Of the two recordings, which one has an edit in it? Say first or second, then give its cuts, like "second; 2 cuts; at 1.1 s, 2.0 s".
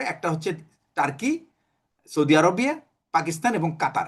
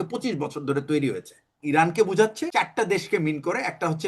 second; 2 cuts; at 1.5 s, 2.4 s